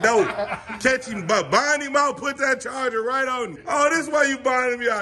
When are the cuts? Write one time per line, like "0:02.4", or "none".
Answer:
0:03.6